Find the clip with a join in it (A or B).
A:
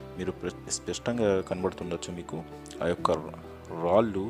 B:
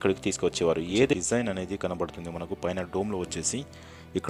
B